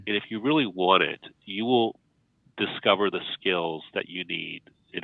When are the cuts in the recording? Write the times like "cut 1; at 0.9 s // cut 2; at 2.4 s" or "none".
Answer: none